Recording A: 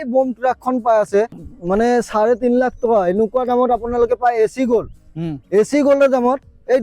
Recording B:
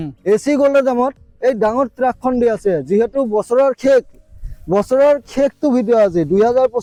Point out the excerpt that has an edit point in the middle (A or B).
A